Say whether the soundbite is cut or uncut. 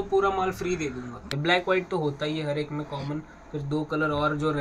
cut